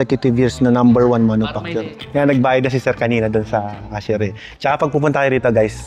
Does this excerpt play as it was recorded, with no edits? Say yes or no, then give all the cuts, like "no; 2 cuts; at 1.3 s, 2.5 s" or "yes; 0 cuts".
no; 1 cut; at 2.0 s